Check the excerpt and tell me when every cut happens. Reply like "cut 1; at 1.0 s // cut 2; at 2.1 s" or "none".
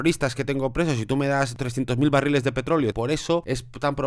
cut 1; at 1.6 s // cut 2; at 3.1 s